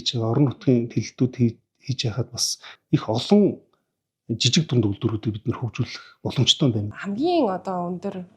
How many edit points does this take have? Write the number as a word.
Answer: two